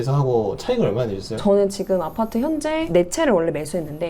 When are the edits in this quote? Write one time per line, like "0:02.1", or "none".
0:01.3